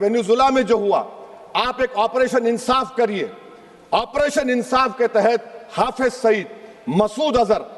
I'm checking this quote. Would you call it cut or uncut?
uncut